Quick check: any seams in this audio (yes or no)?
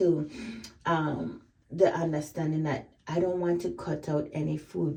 no